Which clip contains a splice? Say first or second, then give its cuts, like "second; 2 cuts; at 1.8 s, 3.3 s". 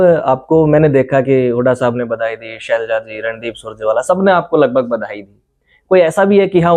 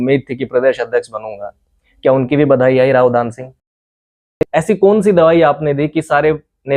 second; 1 cut; at 4.1 s